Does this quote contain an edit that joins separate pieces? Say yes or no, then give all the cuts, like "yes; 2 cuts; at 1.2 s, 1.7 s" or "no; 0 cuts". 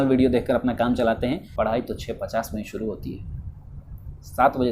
yes; 1 cut; at 1.4 s